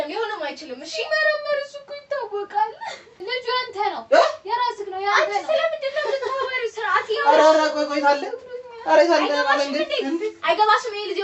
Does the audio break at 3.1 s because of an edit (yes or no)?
yes